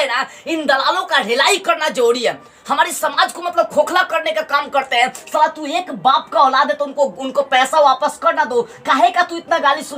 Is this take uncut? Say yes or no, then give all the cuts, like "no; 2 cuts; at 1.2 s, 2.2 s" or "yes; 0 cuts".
yes; 0 cuts